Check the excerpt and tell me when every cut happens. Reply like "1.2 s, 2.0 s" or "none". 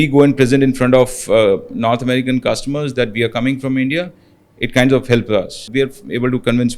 5.6 s